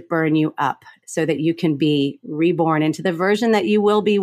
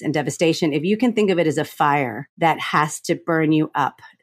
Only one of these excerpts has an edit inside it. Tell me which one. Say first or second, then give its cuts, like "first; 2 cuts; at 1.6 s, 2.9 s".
second; 1 cut; at 2.2 s